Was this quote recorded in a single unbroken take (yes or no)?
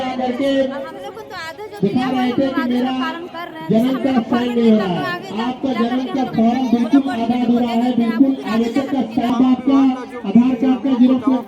no